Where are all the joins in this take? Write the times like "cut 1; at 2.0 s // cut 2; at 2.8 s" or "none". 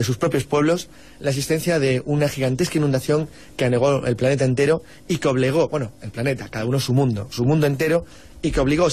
cut 1; at 3.5 s